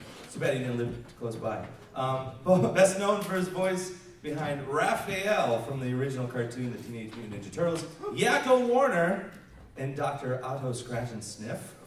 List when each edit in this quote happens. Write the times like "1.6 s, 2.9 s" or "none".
1.8 s